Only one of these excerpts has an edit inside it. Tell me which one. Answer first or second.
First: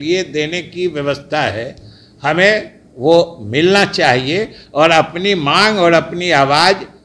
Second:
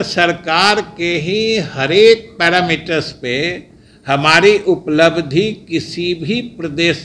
first